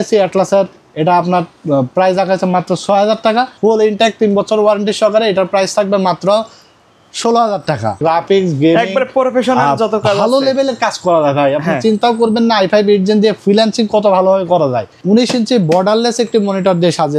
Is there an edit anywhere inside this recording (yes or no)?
yes